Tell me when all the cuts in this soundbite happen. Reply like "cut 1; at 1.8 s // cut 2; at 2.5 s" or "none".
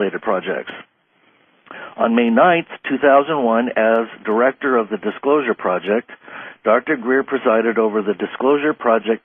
cut 1; at 8.0 s